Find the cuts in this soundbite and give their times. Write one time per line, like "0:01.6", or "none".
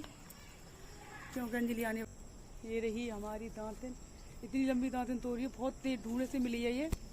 0:02.0